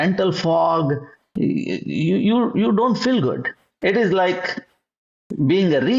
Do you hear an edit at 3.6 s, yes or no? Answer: yes